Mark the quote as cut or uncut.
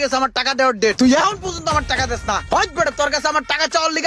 cut